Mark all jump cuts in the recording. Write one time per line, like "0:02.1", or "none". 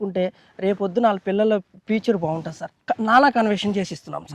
0:02.8